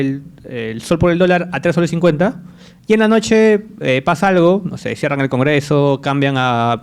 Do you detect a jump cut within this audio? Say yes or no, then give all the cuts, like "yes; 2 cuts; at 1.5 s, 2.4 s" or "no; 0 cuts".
no; 0 cuts